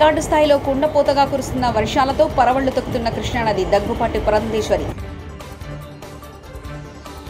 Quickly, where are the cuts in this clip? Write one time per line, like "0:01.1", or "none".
none